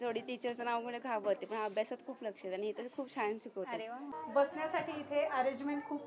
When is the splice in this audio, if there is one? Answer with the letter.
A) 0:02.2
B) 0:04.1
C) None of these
B